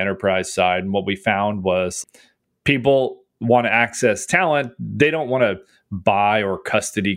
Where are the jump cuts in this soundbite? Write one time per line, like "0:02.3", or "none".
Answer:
0:01.9